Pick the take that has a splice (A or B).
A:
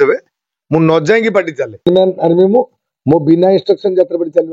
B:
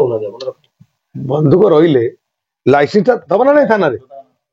A